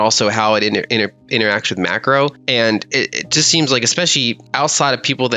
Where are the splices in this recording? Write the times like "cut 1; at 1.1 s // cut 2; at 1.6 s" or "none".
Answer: cut 1; at 2.4 s // cut 2; at 4.4 s